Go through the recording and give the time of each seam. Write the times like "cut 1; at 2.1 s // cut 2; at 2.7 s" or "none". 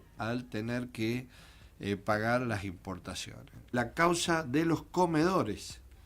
cut 1; at 3.7 s